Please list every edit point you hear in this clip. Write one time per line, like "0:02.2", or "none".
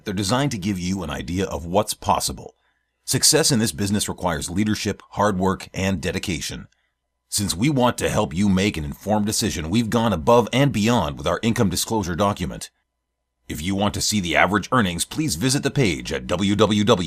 none